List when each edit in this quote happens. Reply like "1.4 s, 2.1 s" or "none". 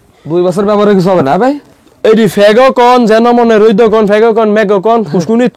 none